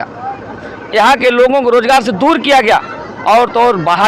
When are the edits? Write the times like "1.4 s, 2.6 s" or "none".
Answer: none